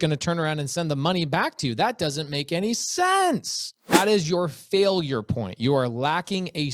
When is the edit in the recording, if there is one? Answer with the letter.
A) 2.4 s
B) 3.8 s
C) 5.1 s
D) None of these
B